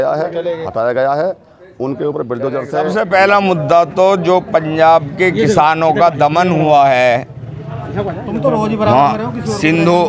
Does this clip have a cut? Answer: yes; 1 cut; at 2.9 s

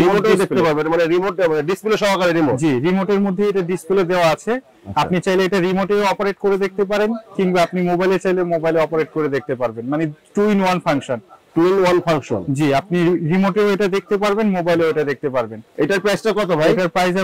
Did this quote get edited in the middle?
no; 0 cuts

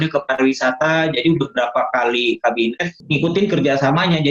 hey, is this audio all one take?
no; 1 cut; at 2.9 s

